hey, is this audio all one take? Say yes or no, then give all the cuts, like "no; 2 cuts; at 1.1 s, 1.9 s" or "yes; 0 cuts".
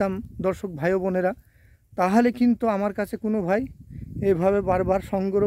yes; 0 cuts